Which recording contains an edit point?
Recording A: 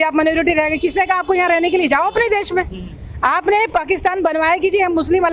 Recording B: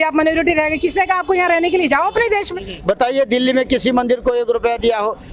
B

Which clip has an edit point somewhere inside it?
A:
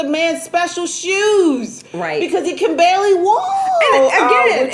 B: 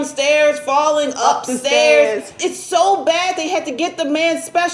B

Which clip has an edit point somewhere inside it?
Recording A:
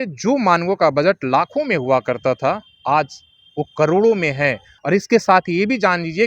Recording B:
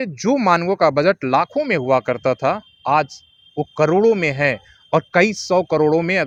A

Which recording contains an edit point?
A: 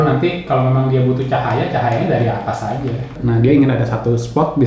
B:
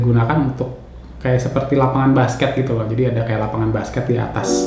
A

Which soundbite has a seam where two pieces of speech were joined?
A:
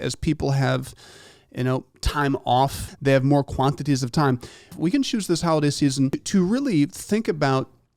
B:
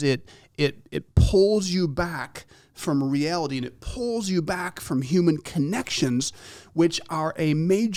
A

